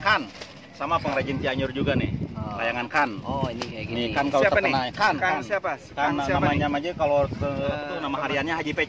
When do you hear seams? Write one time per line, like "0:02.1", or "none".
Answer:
none